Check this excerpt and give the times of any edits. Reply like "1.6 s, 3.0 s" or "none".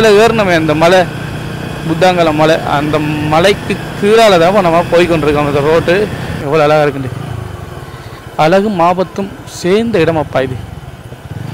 6.3 s